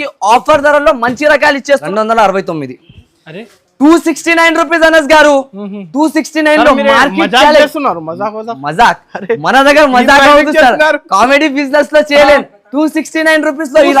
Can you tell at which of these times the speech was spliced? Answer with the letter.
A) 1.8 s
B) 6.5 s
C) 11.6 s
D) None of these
A